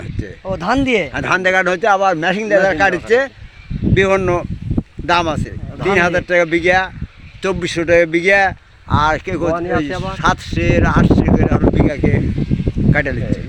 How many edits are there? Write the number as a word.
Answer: zero